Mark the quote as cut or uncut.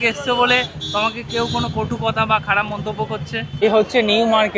cut